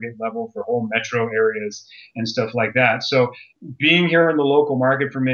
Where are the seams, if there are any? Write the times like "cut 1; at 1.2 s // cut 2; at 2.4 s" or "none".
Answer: cut 1; at 3.5 s